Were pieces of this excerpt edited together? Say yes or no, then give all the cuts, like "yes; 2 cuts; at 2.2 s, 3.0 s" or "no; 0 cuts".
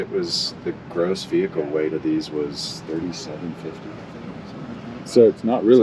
no; 0 cuts